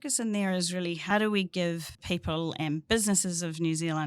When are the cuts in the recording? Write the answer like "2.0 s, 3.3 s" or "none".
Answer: 1.0 s, 1.9 s